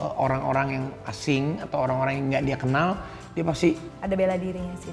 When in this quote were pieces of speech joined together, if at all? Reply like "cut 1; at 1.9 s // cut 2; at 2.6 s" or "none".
cut 1; at 3.9 s